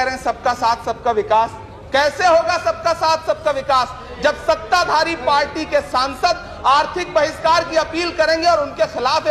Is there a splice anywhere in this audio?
no; 0 cuts

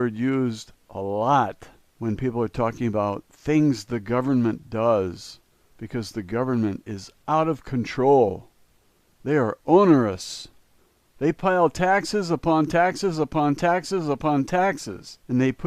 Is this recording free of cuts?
yes; 0 cuts

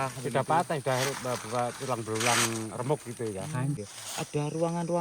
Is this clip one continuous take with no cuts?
no; 1 cut; at 3.8 s

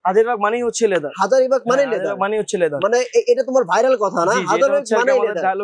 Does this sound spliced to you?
no; 0 cuts

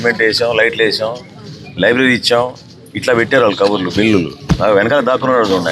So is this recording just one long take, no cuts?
yes; 0 cuts

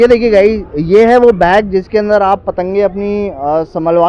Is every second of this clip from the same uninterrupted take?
yes; 0 cuts

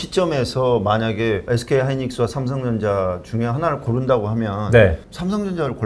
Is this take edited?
no; 0 cuts

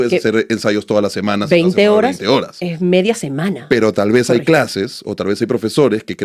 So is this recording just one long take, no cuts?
yes; 0 cuts

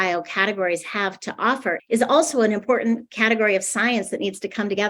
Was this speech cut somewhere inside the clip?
no; 0 cuts

